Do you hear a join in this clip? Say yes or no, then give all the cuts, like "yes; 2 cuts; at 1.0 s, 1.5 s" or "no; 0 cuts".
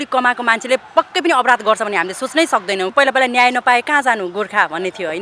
yes; 1 cut; at 2.9 s